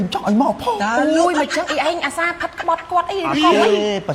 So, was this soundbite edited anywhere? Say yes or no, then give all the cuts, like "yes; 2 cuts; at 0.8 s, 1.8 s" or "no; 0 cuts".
no; 0 cuts